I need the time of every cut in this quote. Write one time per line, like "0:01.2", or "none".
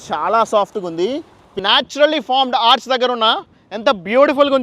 0:01.6